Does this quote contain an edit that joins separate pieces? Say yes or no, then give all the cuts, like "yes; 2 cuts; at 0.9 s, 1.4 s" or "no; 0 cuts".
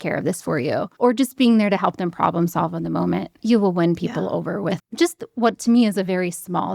yes; 3 cuts; at 0.9 s, 3.3 s, 4.8 s